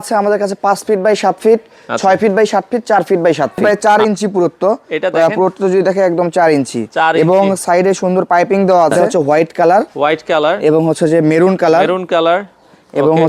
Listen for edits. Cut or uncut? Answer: cut